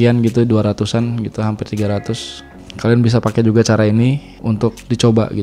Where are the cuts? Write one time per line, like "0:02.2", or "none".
none